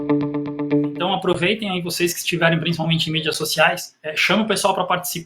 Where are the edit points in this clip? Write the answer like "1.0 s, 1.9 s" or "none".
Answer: 0.9 s